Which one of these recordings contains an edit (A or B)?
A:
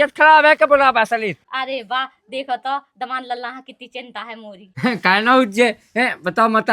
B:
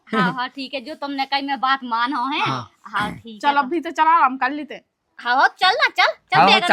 A